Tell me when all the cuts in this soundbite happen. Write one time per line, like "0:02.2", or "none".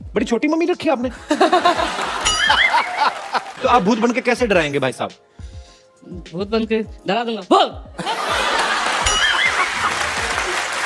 0:03.5